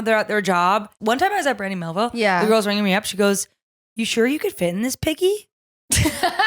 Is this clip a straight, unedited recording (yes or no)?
no